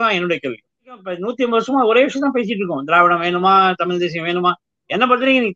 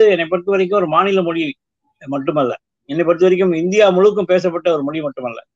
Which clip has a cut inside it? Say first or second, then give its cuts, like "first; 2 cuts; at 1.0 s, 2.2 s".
first; 1 cut; at 1.3 s